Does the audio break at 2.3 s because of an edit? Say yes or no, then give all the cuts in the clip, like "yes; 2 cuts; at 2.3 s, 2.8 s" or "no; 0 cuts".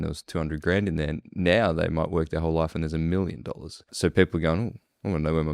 no; 1 cut; at 3.9 s